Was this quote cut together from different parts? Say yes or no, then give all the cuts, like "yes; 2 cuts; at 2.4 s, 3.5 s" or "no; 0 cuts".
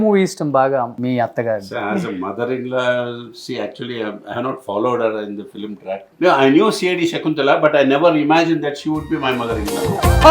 yes; 2 cuts; at 0.9 s, 6.0 s